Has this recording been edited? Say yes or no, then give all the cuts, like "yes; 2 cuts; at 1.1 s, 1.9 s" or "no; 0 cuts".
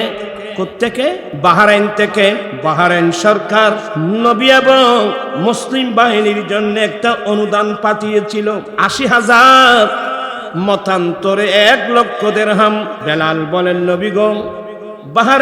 yes; 6 cuts; at 1.3 s, 2.5 s, 3.9 s, 5.3 s, 8.8 s, 13.0 s